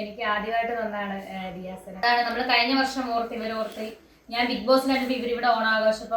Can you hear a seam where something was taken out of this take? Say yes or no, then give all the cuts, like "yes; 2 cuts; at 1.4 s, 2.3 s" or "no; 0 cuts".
yes; 1 cut; at 2.1 s